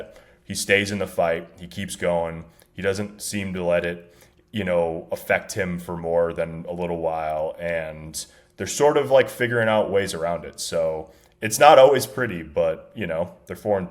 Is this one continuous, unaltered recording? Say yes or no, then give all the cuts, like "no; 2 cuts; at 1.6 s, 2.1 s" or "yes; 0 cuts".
yes; 0 cuts